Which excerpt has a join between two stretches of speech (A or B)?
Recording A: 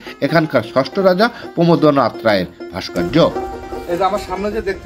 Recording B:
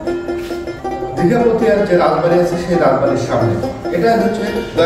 A